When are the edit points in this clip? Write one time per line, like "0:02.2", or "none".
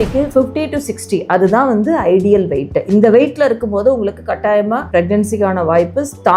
none